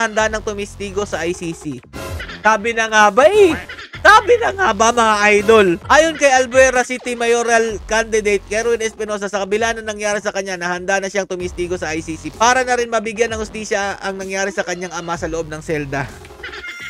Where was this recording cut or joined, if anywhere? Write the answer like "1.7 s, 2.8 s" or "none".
none